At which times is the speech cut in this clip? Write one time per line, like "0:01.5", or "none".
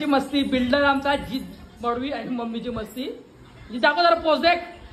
none